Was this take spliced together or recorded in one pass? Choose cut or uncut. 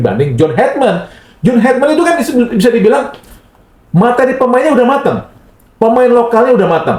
uncut